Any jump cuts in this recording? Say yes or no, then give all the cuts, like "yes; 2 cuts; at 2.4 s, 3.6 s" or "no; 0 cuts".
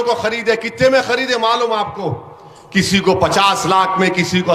no; 0 cuts